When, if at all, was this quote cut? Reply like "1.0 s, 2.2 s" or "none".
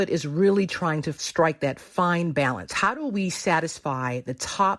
none